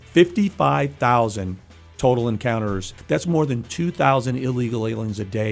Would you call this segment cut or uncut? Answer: cut